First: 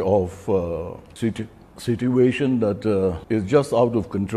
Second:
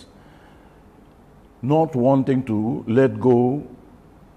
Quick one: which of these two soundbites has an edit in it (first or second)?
first